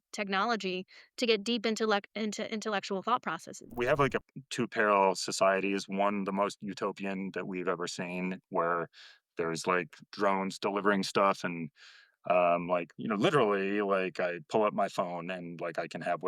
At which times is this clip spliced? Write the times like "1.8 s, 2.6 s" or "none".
3.7 s, 10.1 s